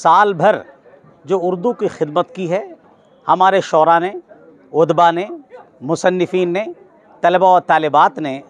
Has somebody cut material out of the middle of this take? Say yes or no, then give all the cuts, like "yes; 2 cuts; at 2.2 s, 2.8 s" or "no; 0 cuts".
yes; 1 cut; at 2.9 s